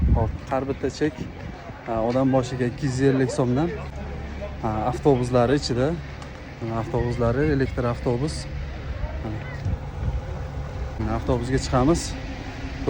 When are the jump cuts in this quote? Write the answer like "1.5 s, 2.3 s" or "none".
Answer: none

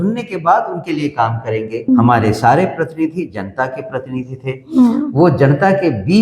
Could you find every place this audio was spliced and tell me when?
1.9 s

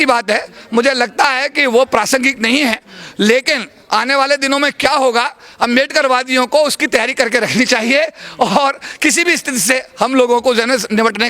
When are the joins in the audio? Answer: none

